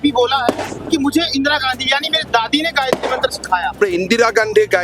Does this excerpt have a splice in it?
yes; 1 cut; at 3.7 s

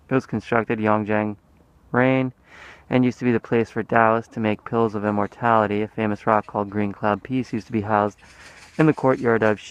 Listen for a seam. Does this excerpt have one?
no; 0 cuts

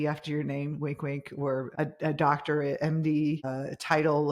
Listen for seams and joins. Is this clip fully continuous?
no; 2 cuts; at 1.7 s, 3.5 s

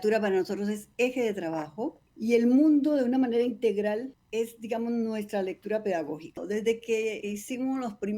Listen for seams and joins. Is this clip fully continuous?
no; 4 cuts; at 2.0 s, 4.2 s, 6.4 s, 7.2 s

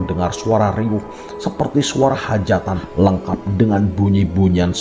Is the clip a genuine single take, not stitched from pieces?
no; 1 cut; at 2.8 s

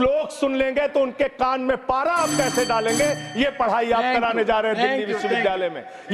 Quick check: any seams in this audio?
no; 0 cuts

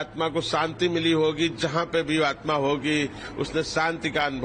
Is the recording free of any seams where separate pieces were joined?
yes; 0 cuts

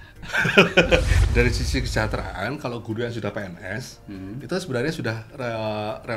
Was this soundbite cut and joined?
yes; 1 cut; at 1.2 s

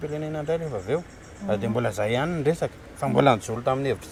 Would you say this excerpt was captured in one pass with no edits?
yes; 0 cuts

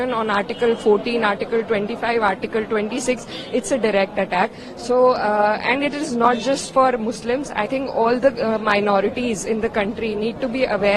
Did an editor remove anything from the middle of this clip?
no; 0 cuts

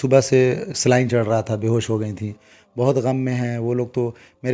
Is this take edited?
no; 0 cuts

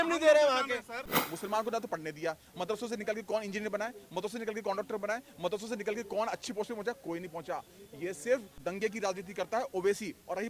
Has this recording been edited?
yes; 2 cuts; at 1.0 s, 8.6 s

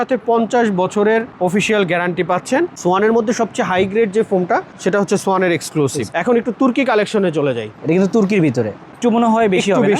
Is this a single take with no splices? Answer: no; 3 cuts; at 2.7 s, 6.1 s, 8.9 s

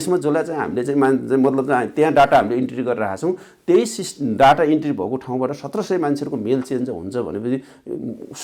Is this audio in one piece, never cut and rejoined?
yes; 0 cuts

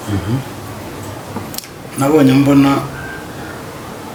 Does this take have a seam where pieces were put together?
no; 0 cuts

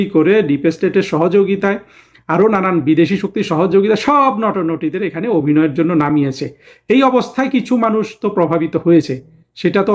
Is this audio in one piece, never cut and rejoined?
yes; 0 cuts

